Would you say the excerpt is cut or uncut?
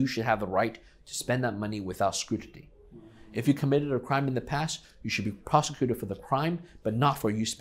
uncut